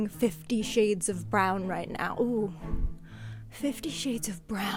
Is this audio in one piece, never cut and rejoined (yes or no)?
yes